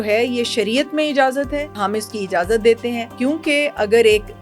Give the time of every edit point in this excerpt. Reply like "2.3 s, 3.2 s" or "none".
1.8 s, 3.1 s